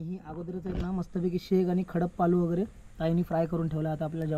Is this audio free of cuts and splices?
yes; 0 cuts

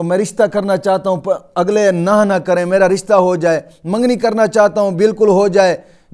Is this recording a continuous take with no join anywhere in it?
yes; 0 cuts

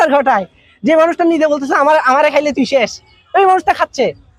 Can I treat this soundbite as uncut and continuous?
yes; 0 cuts

